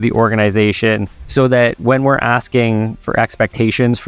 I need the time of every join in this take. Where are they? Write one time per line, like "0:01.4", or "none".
0:01.2
0:03.0